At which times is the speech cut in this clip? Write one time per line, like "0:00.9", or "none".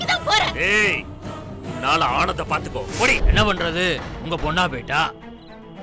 0:03.2